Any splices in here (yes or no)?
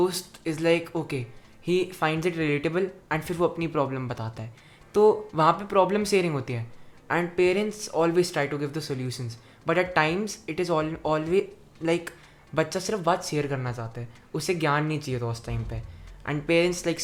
no